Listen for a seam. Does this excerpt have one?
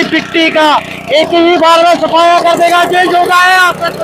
no; 0 cuts

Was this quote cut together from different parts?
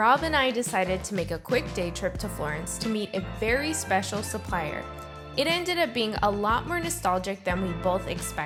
no; 0 cuts

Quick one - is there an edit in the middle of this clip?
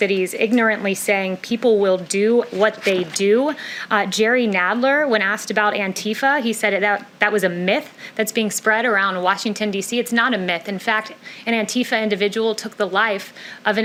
no; 0 cuts

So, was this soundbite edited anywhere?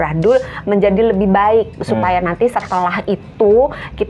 no; 0 cuts

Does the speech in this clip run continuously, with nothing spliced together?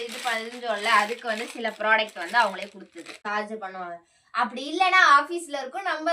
no; 1 cut; at 3.2 s

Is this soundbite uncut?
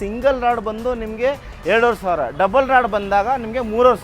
yes; 0 cuts

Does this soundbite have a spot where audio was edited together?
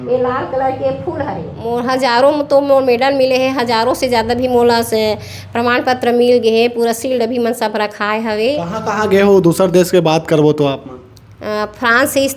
yes; 2 cuts; at 1.5 s, 8.7 s

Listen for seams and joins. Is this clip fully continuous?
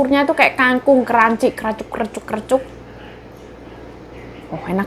yes; 0 cuts

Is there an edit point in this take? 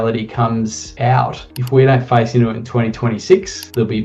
yes; 1 cut; at 1.4 s

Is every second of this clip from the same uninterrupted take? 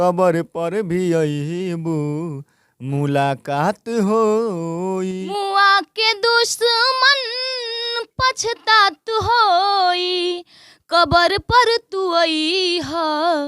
no; 1 cut; at 5.3 s

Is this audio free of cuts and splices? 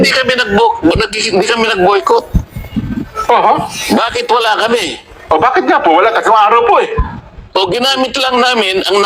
yes; 0 cuts

